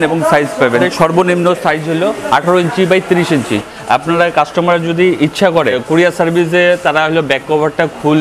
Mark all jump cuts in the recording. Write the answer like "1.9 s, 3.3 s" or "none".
0.8 s, 3.7 s, 5.8 s